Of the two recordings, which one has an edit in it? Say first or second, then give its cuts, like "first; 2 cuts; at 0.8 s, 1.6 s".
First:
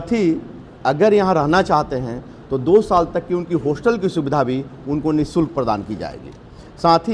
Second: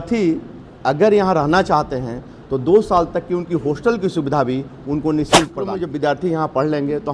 second; 1 cut; at 5.7 s